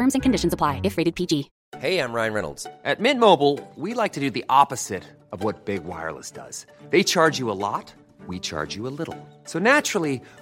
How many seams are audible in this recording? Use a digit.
1